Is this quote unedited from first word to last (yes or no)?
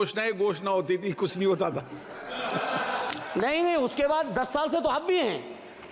yes